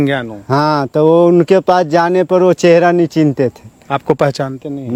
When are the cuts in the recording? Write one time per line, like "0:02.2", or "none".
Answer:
none